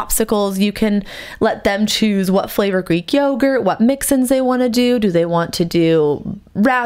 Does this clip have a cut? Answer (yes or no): no